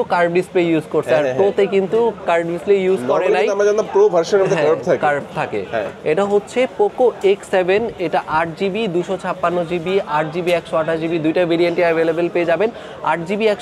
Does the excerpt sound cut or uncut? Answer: uncut